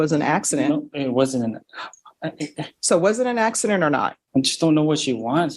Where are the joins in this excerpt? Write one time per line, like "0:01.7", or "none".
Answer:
0:04.2